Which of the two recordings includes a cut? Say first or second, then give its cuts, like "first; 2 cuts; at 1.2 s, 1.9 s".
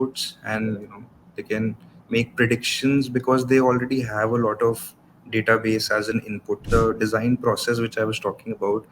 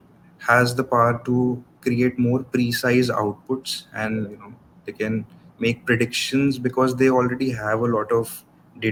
first; 1 cut; at 6.7 s